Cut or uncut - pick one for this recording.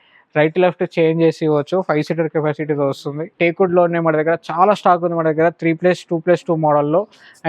cut